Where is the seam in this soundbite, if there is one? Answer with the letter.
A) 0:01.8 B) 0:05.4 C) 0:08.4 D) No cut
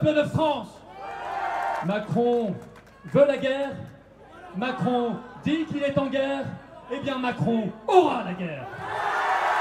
A